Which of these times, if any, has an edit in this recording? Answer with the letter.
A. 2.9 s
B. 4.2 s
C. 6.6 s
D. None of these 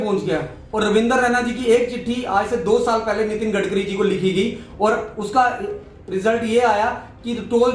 D